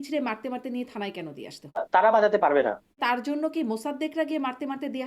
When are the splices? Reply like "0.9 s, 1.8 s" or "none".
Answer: 1.8 s, 3.0 s

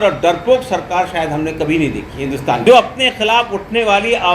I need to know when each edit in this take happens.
2.6 s

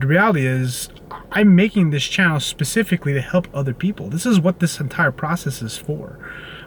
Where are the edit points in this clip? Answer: none

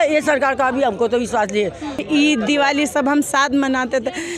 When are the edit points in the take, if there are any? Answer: 2.0 s

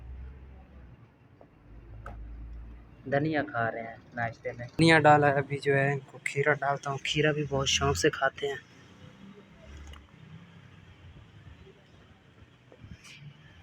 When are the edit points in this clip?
4.8 s

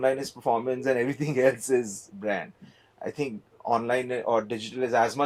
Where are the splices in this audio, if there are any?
none

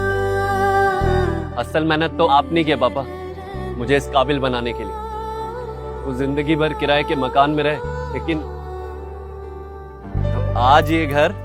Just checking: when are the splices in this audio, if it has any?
1.3 s

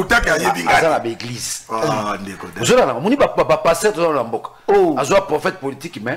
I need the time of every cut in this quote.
none

